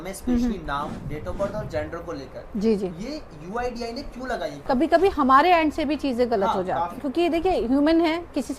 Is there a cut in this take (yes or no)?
yes